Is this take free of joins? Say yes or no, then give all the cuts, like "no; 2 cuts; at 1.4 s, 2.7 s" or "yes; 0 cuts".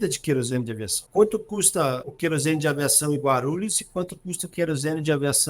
no; 2 cuts; at 1.0 s, 2.1 s